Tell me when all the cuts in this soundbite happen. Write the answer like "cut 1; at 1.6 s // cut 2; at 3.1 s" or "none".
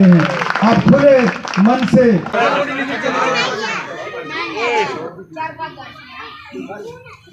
cut 1; at 2.3 s

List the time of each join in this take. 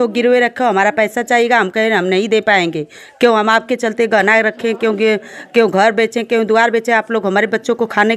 none

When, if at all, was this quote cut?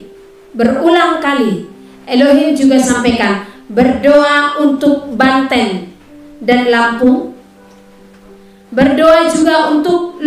none

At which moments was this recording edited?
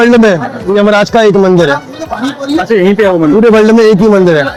none

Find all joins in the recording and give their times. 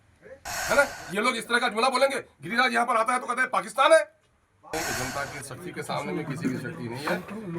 cut 1; at 4.7 s

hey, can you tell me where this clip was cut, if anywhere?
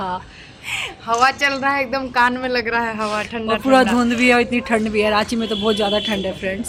none

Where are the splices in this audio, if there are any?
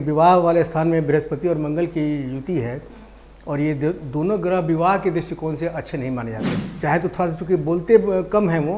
cut 1; at 6.6 s

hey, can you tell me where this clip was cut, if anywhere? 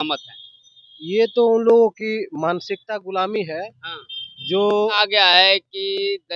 cut 1; at 5.0 s

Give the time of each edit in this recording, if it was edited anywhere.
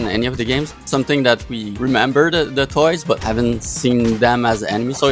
cut 1; at 0.8 s // cut 2; at 1.6 s // cut 3; at 3.2 s

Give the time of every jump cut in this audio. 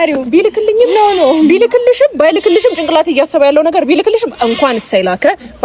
none

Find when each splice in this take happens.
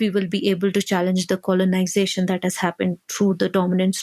cut 1; at 3.0 s

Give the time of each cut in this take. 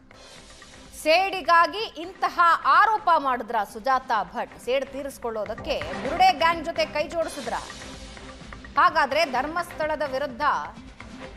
cut 1; at 1.0 s

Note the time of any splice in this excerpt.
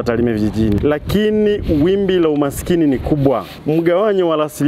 cut 1; at 0.8 s // cut 2; at 3.5 s

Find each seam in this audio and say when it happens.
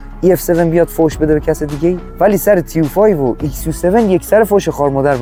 none

